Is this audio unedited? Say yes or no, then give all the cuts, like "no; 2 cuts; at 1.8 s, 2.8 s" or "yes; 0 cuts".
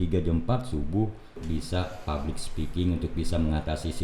no; 1 cut; at 1.4 s